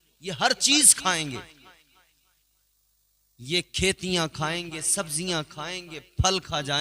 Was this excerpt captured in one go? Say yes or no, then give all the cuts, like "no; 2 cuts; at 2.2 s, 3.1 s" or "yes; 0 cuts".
yes; 0 cuts